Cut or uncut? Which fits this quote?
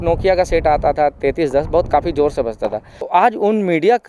cut